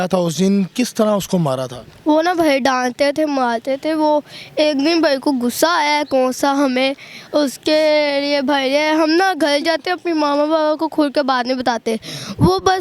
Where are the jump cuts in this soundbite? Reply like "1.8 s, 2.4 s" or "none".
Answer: none